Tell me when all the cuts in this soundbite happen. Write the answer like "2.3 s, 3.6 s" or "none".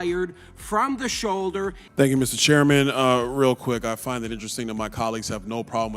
1.8 s

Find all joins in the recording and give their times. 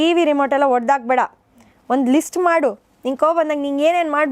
none

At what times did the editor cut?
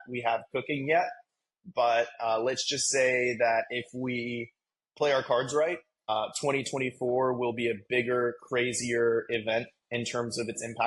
6.1 s

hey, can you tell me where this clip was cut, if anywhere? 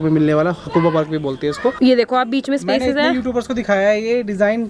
1.8 s

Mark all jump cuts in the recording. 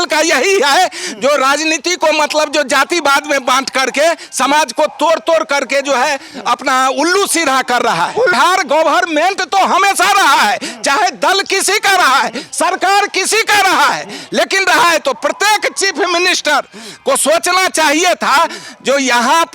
8.3 s

